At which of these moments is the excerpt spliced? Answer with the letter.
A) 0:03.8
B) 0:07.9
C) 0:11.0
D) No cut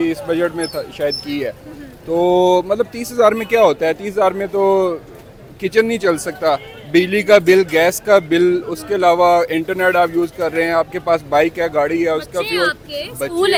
D